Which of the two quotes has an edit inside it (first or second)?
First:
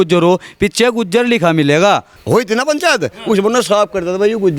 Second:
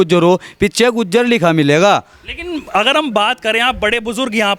first